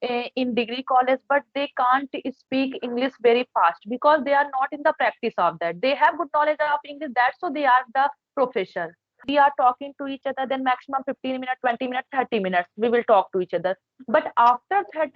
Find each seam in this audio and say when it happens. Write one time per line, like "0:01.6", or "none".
0:09.2